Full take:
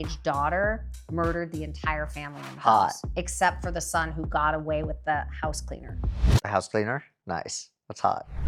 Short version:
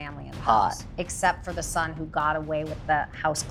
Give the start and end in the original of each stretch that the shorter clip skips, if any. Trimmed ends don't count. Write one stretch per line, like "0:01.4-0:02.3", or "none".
none